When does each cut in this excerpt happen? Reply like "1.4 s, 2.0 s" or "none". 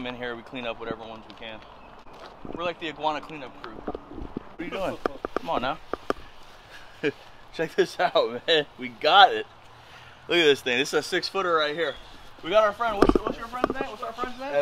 2.0 s, 4.5 s